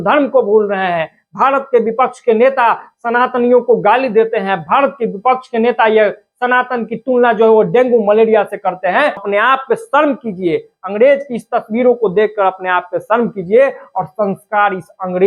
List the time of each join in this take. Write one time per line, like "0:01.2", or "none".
0:09.2